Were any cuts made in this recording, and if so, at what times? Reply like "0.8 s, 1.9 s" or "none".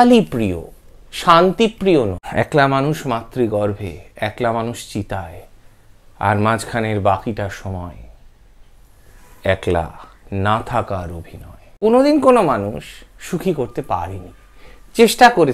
2.2 s, 11.8 s